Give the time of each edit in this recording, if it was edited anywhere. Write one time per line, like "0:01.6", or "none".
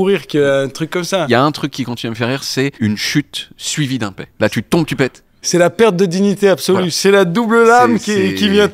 0:01.3
0:02.8
0:04.2
0:05.5

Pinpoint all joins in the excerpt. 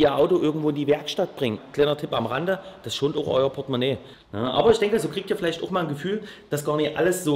0:01.6
0:04.1

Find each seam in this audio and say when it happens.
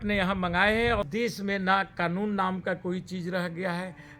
0:01.0

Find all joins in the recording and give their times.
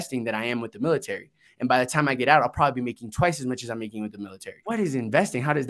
0:04.5

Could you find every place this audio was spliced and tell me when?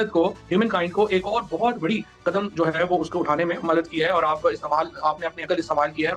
none

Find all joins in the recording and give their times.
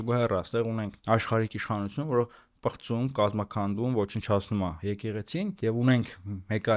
0:05.1

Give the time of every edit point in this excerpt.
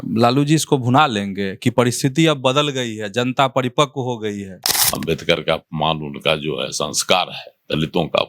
0:04.8

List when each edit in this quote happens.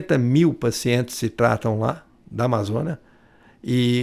none

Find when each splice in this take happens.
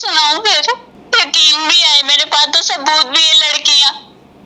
0:00.9

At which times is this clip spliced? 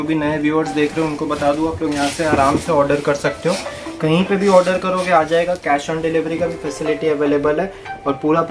none

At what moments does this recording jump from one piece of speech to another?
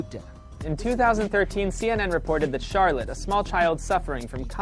0:01.3

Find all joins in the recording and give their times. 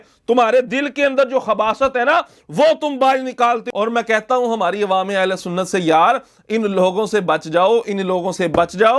0:03.7

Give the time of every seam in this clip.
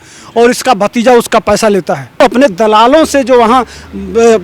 0:02.2

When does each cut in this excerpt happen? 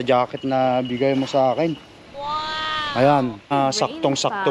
0:03.5

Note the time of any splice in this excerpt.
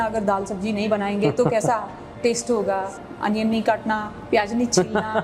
0:02.9

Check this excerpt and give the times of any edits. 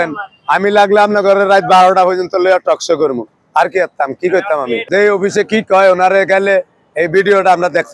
none

